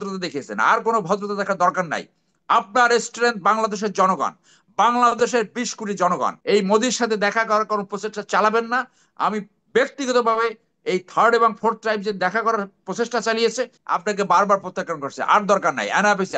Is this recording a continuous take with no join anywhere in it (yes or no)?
no